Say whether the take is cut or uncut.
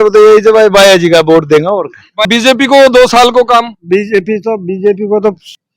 cut